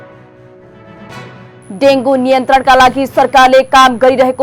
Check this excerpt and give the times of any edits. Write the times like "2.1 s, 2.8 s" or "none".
1.1 s